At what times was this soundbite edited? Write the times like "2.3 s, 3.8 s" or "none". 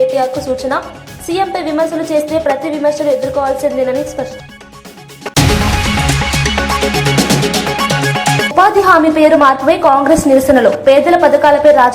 4.3 s

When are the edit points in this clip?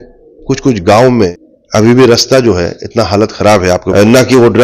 1.3 s, 3.8 s

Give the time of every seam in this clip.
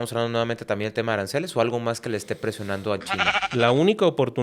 3.4 s

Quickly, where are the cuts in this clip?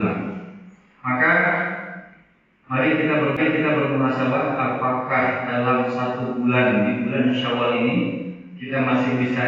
none

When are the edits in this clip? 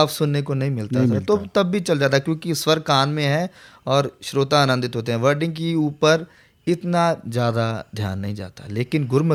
none

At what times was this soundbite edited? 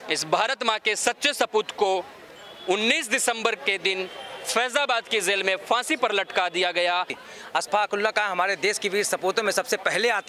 7.2 s

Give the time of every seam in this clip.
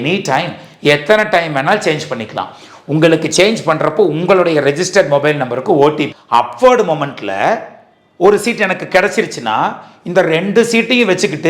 6.1 s

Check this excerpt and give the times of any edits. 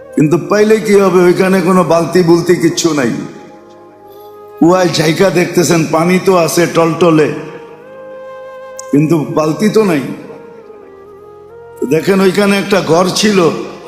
7.5 s, 8.9 s

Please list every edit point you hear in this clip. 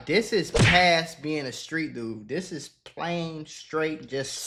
none

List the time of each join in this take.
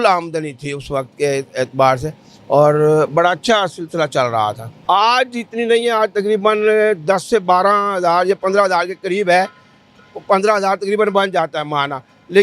4.7 s

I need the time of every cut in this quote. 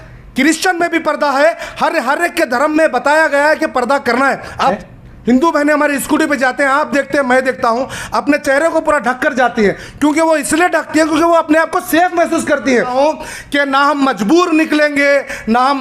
4.8 s, 12.9 s

